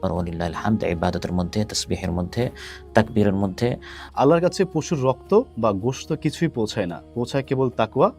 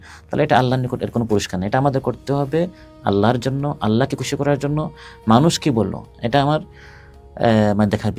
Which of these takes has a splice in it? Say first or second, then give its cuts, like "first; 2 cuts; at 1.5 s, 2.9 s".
first; 1 cut; at 4.0 s